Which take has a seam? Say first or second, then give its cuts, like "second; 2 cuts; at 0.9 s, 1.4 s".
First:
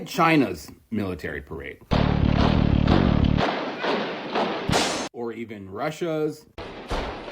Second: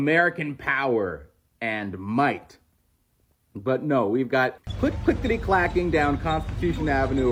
first; 1 cut; at 5.1 s